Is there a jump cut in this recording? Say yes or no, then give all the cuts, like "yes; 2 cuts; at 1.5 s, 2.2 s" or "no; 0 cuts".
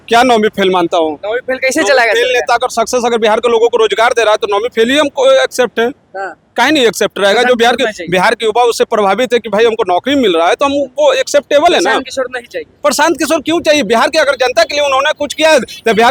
no; 0 cuts